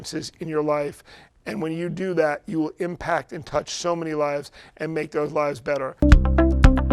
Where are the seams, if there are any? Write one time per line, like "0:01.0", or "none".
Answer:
0:05.9